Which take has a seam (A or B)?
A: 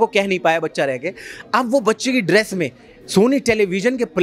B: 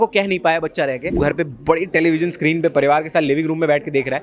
B